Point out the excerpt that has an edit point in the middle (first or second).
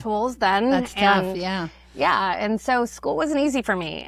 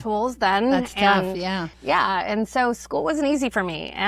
second